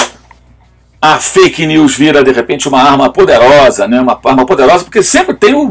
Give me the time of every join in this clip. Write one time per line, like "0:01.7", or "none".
none

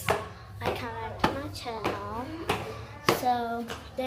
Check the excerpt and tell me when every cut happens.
none

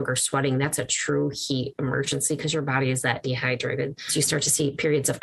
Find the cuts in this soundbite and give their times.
0:04.1

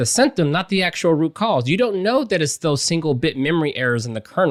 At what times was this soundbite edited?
none

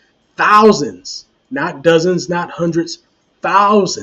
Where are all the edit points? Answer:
none

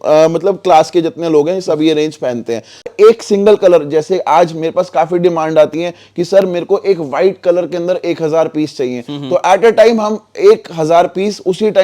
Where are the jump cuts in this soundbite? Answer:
0:02.9

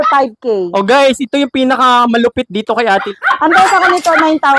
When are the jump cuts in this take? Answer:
0:03.1

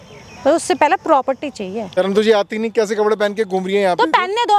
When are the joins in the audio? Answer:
0:02.0

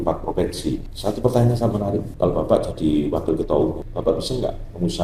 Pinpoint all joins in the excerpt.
0:00.9
0:02.1
0:03.9

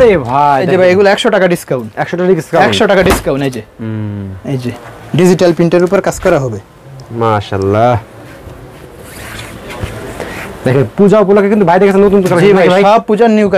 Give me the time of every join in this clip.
none

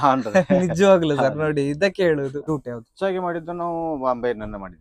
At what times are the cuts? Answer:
0:02.4

